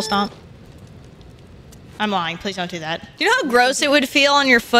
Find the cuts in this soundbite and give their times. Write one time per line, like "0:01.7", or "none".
0:02.0
0:03.1